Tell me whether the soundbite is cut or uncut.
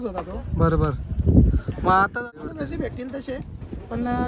cut